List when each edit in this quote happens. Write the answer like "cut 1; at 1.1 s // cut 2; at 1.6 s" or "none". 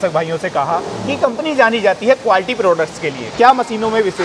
cut 1; at 3.3 s